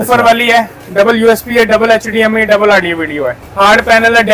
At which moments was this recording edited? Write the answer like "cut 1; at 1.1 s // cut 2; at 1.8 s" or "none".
cut 1; at 3.4 s